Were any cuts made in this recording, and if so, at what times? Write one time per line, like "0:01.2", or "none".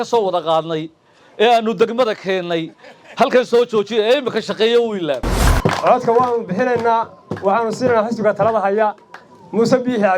0:05.4